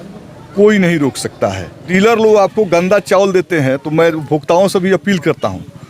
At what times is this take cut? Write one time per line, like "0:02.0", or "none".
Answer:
0:01.8